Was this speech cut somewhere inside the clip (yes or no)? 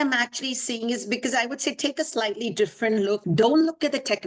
yes